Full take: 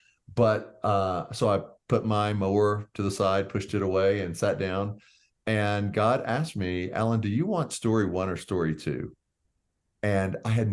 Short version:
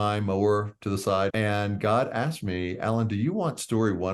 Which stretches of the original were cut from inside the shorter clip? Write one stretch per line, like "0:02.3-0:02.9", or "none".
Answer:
0:03.5-0:05.5